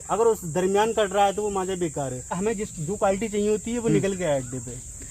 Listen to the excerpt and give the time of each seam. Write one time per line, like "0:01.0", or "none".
0:02.4